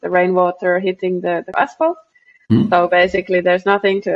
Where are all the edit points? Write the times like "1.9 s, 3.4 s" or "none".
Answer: 1.5 s